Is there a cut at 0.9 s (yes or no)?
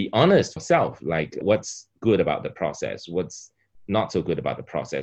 yes